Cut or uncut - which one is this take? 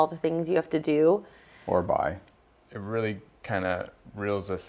cut